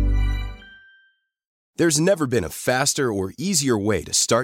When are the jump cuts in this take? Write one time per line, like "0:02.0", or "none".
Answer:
0:01.5